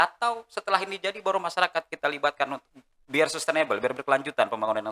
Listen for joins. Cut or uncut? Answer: uncut